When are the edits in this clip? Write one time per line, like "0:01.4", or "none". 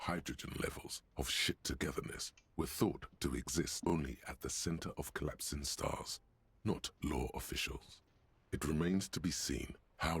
0:03.9